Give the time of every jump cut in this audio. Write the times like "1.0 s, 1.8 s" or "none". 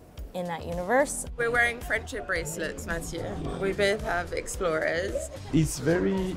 1.4 s, 5.4 s

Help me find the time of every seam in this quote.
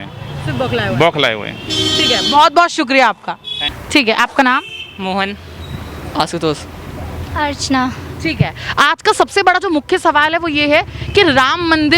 none

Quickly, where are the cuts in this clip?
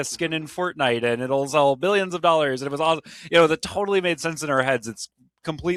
none

